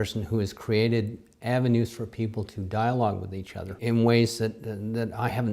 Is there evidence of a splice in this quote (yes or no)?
yes